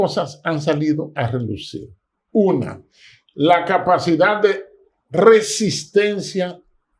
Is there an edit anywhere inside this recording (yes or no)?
no